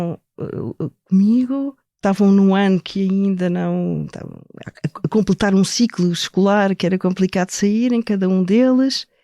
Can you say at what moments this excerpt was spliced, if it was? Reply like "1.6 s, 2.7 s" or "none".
1.8 s